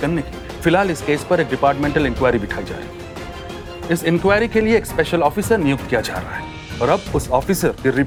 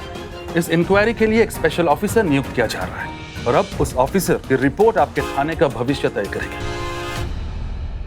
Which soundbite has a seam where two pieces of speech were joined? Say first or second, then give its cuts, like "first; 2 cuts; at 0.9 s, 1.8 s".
second; 1 cut; at 6.4 s